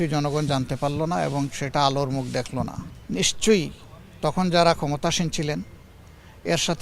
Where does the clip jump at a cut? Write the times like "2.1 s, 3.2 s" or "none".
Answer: 2.9 s